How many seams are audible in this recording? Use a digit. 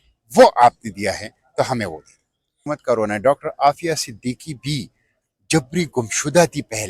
1